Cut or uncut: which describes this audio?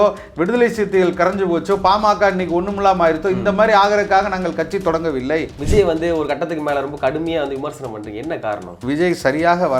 cut